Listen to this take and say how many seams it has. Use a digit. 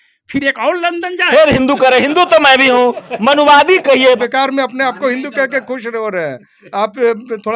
1